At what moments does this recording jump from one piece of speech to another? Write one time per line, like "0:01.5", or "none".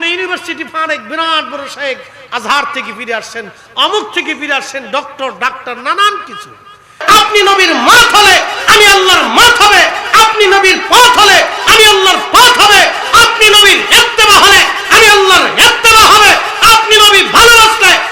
0:06.9

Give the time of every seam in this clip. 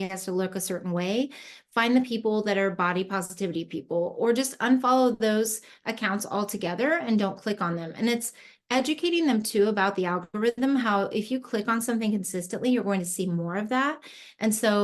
none

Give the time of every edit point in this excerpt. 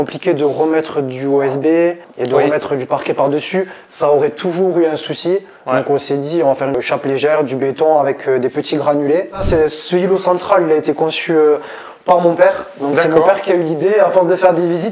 0:02.1
0:06.8
0:09.4

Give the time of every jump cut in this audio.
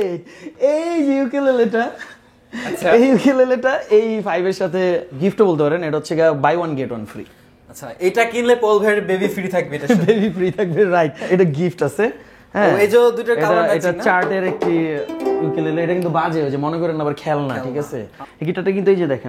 0:05.1
0:11.2
0:18.1

